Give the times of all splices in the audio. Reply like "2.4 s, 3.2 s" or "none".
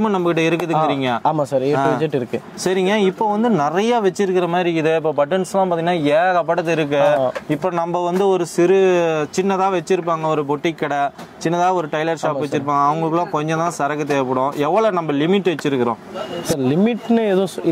none